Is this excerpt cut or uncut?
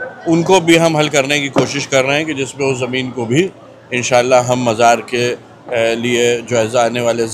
uncut